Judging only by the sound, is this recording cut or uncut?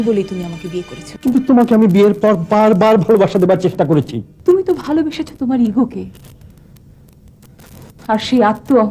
cut